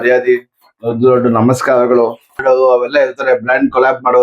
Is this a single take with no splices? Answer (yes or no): no